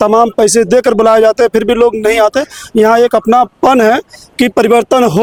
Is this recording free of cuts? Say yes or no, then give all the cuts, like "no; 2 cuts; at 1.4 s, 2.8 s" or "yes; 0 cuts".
yes; 0 cuts